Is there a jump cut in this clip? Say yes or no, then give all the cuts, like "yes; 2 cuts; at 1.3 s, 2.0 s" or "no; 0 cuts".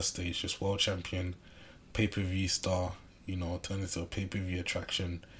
no; 0 cuts